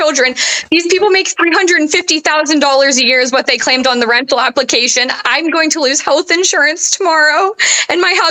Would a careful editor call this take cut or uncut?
uncut